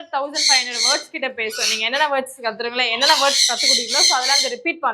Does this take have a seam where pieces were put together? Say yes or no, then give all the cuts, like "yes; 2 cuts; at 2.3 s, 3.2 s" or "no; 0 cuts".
no; 0 cuts